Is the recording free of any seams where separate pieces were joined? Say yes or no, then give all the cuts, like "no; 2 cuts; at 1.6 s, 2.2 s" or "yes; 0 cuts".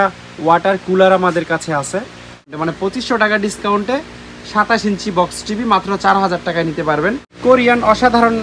no; 2 cuts; at 2.5 s, 7.3 s